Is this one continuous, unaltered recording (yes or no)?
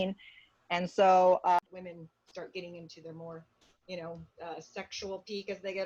no